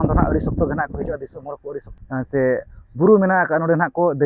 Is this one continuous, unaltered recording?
no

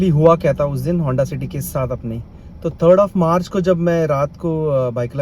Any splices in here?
no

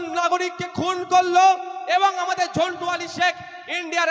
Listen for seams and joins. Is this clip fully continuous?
yes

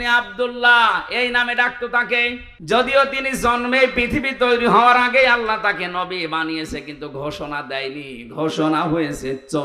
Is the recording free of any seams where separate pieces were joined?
no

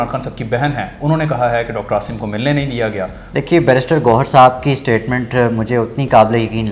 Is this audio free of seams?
no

